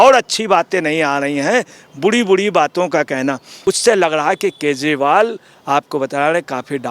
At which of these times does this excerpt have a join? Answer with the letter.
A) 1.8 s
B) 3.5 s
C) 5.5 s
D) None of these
B